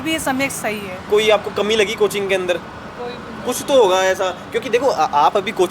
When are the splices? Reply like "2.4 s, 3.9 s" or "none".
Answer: 1.0 s